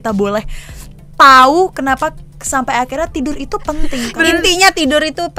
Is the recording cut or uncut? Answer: cut